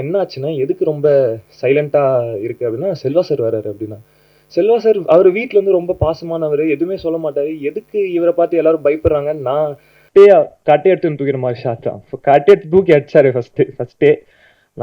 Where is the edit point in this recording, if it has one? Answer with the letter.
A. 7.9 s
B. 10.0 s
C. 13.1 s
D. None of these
B